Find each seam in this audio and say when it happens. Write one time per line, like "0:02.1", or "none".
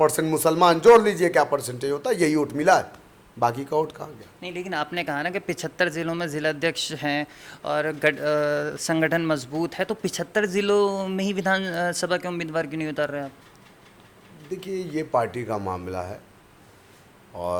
none

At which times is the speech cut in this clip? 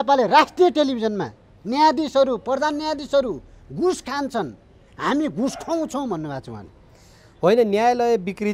none

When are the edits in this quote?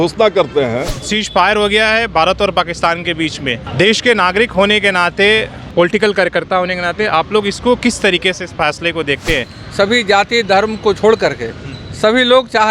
0:01.0
0:03.7
0:05.6
0:09.6

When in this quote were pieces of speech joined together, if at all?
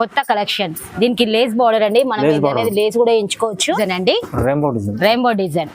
0:03.8

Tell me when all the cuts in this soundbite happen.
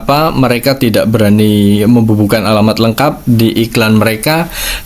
none

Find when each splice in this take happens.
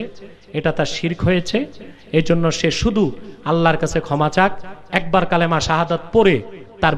none

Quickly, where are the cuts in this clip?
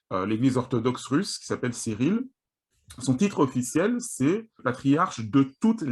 0:04.5

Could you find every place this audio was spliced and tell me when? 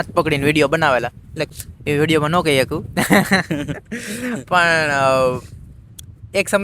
0:01.4

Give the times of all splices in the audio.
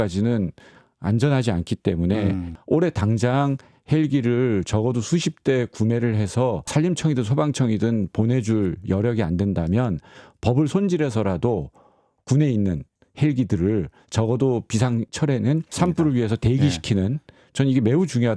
0:02.5
0:06.7
0:15.5

